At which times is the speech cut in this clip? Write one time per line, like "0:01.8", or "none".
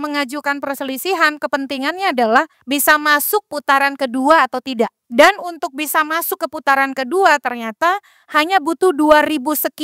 0:02.6
0:05.0